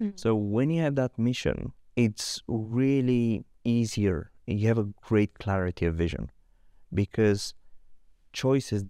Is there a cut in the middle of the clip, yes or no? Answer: yes